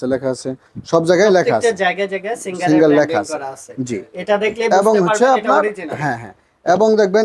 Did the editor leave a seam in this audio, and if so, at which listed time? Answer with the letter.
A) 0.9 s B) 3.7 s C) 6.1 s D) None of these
D